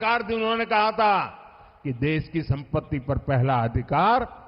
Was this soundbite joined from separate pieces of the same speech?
no; 0 cuts

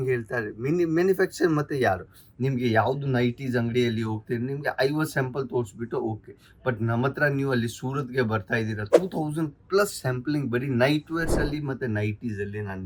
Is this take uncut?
yes; 0 cuts

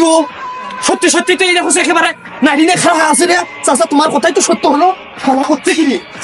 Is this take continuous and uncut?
yes; 0 cuts

